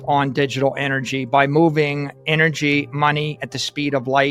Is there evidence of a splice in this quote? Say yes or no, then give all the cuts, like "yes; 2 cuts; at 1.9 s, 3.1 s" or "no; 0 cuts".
no; 0 cuts